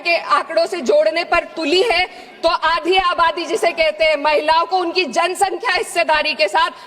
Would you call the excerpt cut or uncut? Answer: uncut